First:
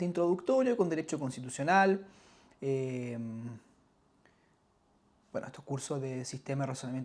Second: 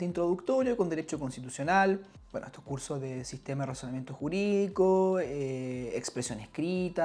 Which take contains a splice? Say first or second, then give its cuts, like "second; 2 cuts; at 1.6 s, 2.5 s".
second; 1 cut; at 2.2 s